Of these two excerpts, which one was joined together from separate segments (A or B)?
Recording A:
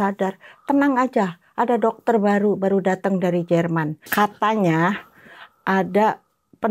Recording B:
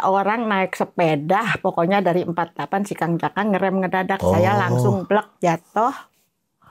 A